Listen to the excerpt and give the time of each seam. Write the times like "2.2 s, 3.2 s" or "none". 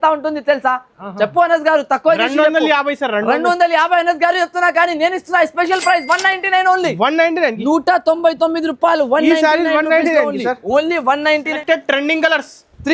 11.6 s